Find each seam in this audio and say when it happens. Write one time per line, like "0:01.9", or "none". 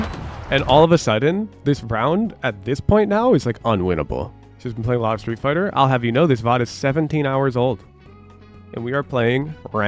0:04.3